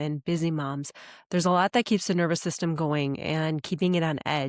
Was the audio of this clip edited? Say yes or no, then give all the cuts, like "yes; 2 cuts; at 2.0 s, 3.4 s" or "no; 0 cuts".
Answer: no; 0 cuts